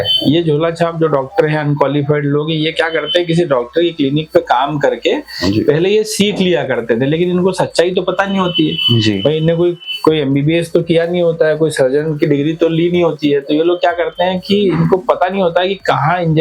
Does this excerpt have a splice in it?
no; 0 cuts

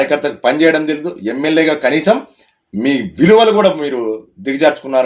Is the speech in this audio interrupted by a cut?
no; 0 cuts

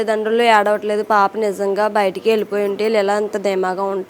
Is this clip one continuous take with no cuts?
yes; 0 cuts

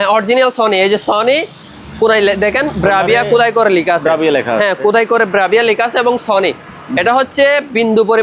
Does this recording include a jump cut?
no; 0 cuts

